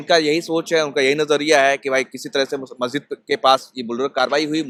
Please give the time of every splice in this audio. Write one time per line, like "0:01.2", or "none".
none